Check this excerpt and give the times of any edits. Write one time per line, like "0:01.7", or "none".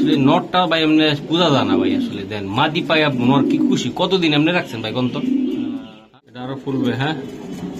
0:06.0